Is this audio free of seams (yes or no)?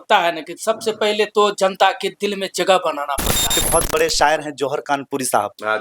no